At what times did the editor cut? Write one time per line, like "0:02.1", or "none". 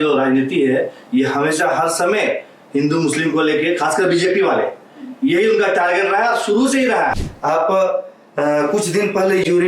0:07.2